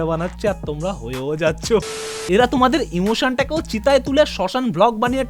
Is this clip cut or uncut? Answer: cut